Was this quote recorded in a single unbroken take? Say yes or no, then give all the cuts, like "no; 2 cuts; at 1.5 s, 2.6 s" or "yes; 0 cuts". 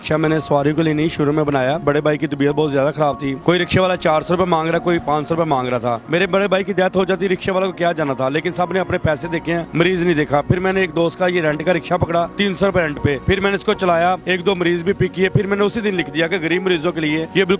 no; 4 cuts; at 1.8 s, 3.4 s, 6.0 s, 10.4 s